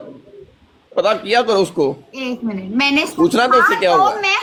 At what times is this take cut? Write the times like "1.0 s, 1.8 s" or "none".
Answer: none